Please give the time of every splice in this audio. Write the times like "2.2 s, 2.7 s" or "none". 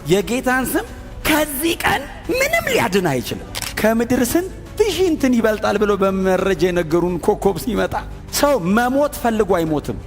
3.6 s